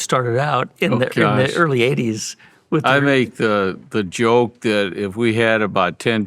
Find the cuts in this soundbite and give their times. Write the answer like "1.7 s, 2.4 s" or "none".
none

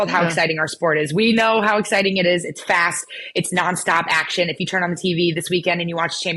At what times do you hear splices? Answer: none

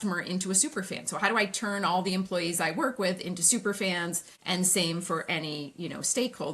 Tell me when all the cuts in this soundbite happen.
4.3 s

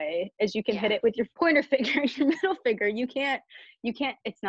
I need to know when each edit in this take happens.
1.3 s

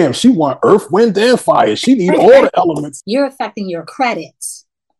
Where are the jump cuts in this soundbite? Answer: 2.9 s

